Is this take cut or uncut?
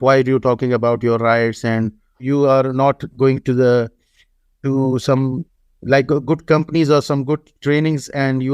cut